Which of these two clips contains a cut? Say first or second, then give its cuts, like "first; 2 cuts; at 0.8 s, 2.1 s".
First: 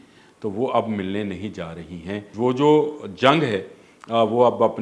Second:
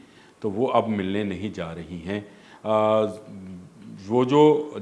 first; 1 cut; at 2.2 s